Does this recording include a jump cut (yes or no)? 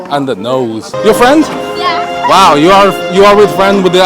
yes